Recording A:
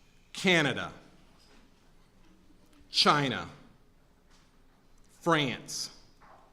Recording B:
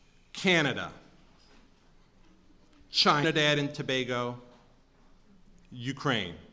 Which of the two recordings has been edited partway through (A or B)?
A